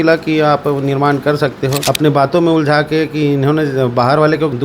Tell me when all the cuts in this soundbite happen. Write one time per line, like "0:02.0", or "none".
0:01.8